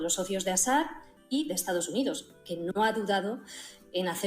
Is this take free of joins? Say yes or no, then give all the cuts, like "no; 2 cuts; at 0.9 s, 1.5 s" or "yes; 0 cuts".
no; 1 cut; at 1.1 s